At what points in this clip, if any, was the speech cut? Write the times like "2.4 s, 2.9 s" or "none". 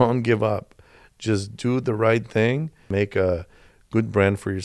2.9 s